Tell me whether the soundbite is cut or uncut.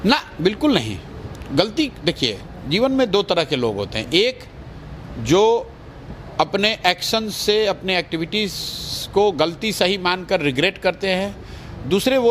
uncut